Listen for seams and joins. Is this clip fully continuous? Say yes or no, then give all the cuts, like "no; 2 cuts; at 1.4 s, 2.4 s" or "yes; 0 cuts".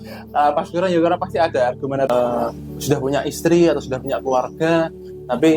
no; 1 cut; at 2.1 s